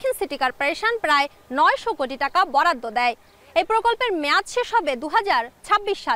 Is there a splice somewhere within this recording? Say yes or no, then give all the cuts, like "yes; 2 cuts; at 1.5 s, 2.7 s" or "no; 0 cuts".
no; 0 cuts